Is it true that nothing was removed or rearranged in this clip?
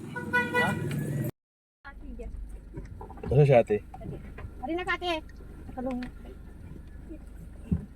no; 1 cut; at 1.3 s

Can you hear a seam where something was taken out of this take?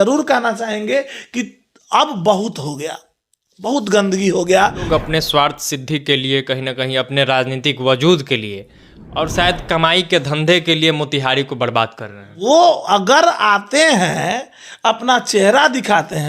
yes; 2 cuts; at 4.8 s, 12.4 s

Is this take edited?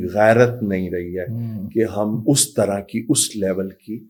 no; 0 cuts

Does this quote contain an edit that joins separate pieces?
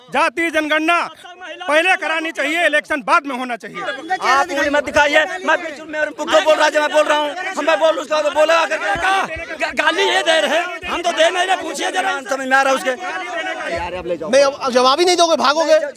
yes; 2 cuts; at 3.9 s, 13.7 s

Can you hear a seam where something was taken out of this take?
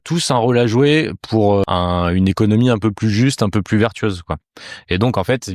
yes; 1 cut; at 1.6 s

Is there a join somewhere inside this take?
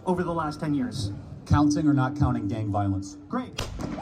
no; 0 cuts

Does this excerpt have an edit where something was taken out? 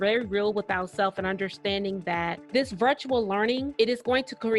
yes; 2 cuts; at 2.4 s, 3.7 s

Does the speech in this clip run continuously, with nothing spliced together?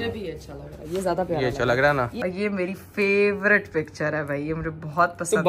no; 1 cut; at 2.1 s

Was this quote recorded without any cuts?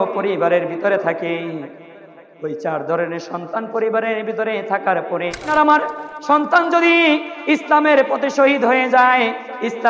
no; 1 cut; at 5.4 s

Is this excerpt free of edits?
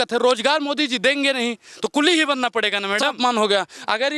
no; 1 cut; at 3.2 s

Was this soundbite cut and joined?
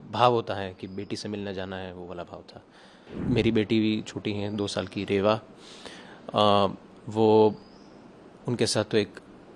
yes; 1 cut; at 3.1 s

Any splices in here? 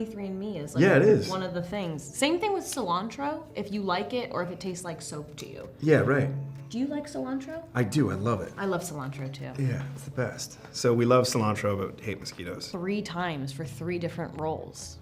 yes; 1 cut; at 12.7 s

